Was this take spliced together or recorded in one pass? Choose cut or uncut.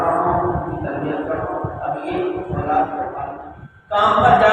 cut